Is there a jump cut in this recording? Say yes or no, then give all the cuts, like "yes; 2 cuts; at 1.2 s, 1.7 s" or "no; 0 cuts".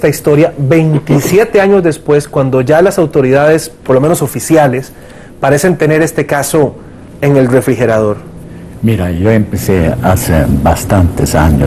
yes; 1 cut; at 4.2 s